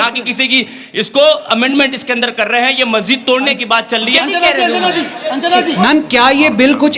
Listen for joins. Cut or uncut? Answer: cut